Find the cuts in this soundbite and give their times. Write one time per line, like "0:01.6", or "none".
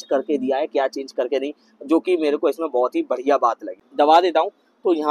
0:03.8

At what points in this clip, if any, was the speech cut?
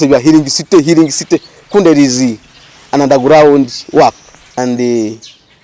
0:04.3

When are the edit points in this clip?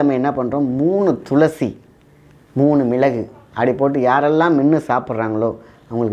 none

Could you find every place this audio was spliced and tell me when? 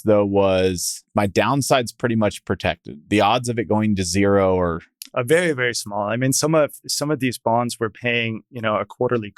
0:01.0

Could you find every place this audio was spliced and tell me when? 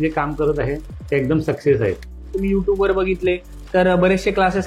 0:02.3

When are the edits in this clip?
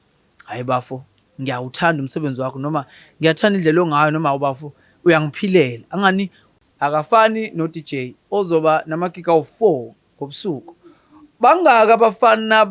0:06.4

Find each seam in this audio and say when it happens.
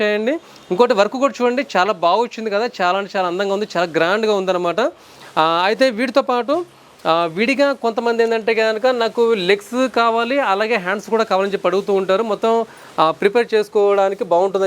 none

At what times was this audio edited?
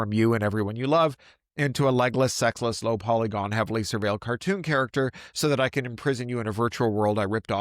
none

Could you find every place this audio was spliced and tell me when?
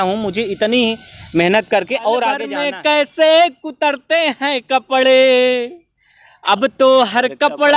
0:02.5

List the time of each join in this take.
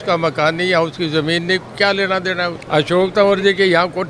0:02.6

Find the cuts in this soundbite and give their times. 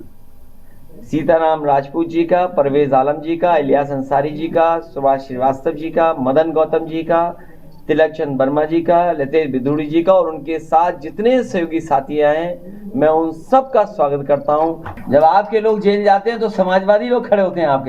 0:14.9

